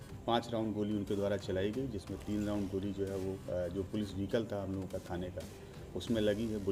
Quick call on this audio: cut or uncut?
uncut